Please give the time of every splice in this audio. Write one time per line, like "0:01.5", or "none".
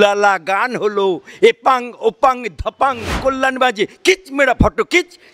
0:03.2